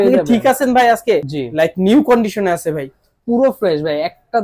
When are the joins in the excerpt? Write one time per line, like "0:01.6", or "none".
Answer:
0:01.3